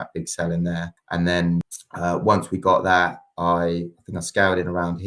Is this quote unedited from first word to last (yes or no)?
no